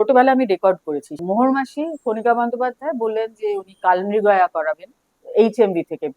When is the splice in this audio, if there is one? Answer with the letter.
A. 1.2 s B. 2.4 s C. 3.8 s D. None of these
A